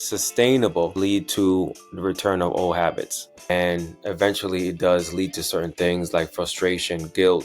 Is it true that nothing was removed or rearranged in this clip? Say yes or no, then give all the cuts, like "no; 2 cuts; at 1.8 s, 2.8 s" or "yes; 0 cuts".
no; 2 cuts; at 0.9 s, 3.4 s